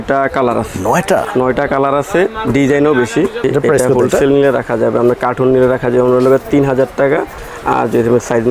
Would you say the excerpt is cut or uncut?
cut